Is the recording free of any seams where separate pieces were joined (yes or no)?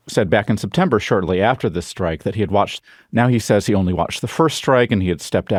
yes